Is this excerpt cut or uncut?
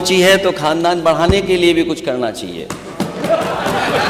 uncut